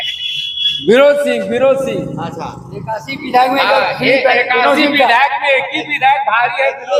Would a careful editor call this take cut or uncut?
uncut